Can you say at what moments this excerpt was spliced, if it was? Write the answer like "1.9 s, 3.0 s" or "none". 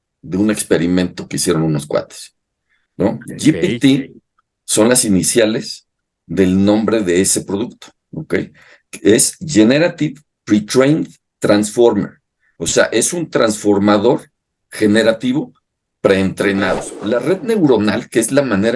16.9 s